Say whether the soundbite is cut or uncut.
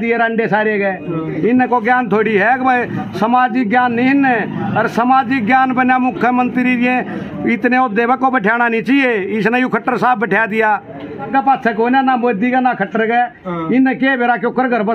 cut